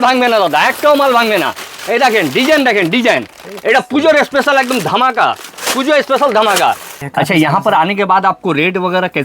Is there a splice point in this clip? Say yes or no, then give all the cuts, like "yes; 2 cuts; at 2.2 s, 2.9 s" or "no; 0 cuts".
yes; 1 cut; at 7.0 s